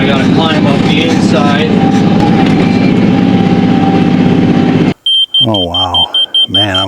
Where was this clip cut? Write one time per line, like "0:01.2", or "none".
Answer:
0:04.9